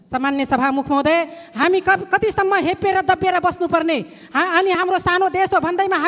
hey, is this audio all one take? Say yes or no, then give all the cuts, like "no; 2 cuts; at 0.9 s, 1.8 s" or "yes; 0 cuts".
yes; 0 cuts